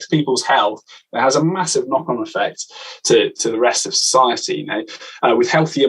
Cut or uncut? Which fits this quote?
uncut